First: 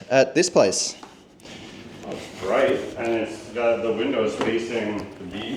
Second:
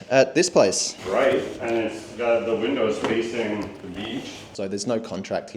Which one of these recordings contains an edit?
second; 2 cuts; at 0.9 s, 4.5 s

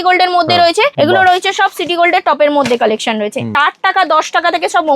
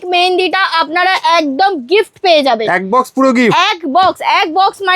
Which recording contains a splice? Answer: first; 2 cuts; at 0.9 s, 3.5 s

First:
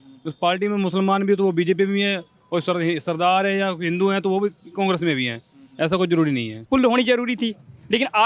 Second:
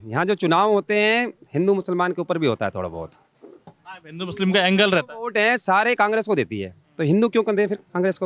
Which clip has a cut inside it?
first; 1 cut; at 6.5 s

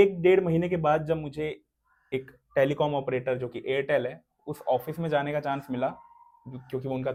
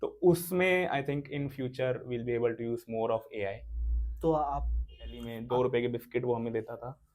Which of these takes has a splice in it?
second; 1 cut; at 5.3 s

